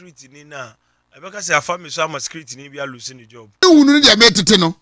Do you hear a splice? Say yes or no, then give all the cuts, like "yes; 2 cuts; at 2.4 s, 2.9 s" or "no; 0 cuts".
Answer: yes; 1 cut; at 3.6 s